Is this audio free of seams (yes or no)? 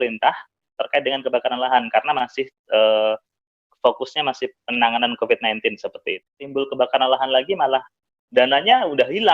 no